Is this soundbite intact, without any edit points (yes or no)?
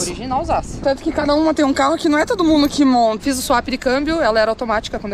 no